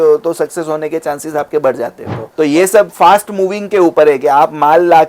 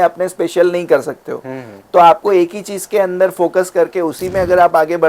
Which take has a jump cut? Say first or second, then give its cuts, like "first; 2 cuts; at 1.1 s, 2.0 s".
first; 1 cut; at 2.1 s